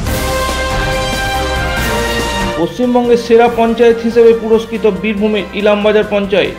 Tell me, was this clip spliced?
yes; 1 cut; at 2.5 s

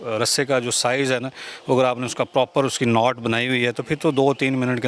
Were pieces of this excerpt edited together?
no; 0 cuts

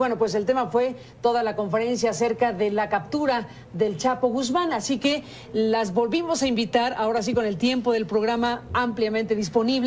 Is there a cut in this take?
no; 0 cuts

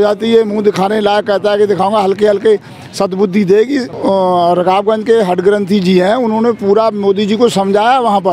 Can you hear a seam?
yes; 1 cut; at 3.9 s

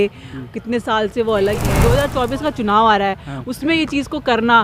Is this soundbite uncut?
no; 1 cut; at 1.9 s

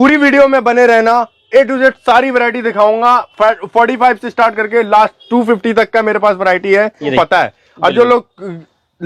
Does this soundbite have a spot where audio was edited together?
yes; 1 cut; at 7.1 s

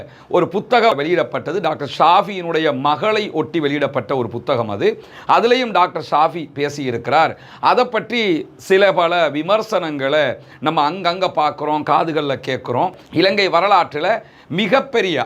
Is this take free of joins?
no; 2 cuts; at 1.0 s, 13.0 s

